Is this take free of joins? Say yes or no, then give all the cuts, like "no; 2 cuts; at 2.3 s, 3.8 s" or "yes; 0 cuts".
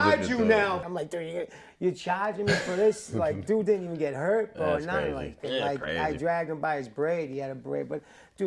no; 2 cuts; at 0.8 s, 5.4 s